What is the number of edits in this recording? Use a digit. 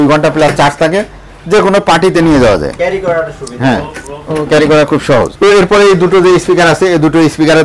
0